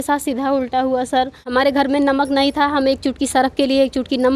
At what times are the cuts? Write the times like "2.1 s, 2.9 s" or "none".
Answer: 1.4 s